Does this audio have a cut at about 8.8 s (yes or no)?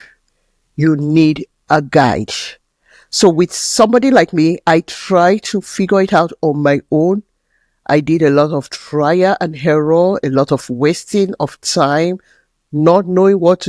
no